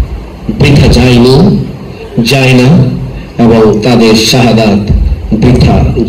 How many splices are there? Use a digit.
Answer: 0